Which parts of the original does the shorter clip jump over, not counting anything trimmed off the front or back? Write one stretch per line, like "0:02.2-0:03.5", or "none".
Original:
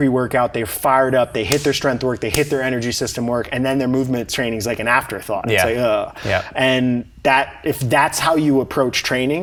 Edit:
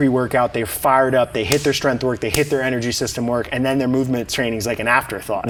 none